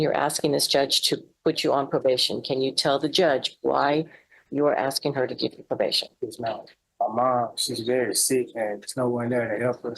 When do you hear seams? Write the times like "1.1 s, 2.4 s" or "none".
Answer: 6.8 s